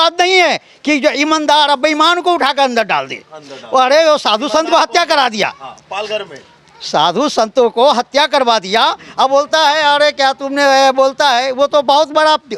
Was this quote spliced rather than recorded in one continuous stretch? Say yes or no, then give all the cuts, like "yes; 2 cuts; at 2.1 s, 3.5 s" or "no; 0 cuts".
no; 0 cuts